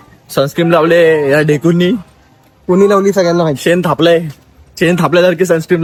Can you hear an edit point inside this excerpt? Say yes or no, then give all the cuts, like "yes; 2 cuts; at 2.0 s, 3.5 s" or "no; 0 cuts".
no; 0 cuts